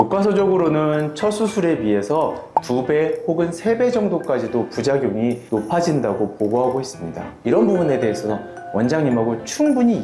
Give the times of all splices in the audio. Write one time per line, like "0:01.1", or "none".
0:07.3